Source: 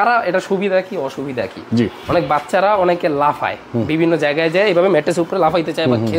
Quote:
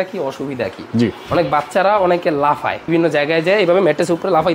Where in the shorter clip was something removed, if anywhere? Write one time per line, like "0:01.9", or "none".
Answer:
0:02.8